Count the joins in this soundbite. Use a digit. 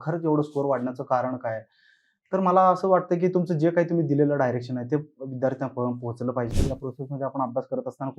1